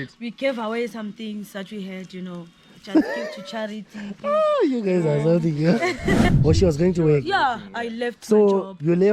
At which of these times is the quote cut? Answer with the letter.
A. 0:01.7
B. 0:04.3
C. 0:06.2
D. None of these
C